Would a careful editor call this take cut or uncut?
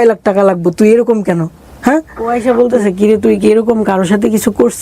cut